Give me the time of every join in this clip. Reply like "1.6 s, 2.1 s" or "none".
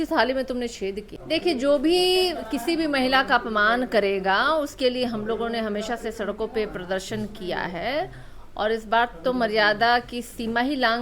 1.1 s